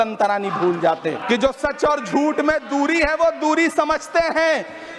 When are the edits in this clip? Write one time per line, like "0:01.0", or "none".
0:01.2